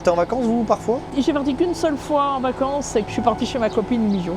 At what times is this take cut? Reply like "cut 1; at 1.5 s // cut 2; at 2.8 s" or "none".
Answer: cut 1; at 1.1 s // cut 2; at 3.0 s